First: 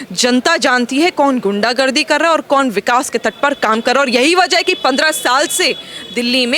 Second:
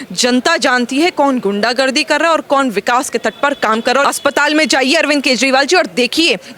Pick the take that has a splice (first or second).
second